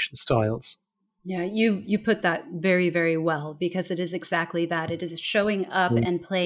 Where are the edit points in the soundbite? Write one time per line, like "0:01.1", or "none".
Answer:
none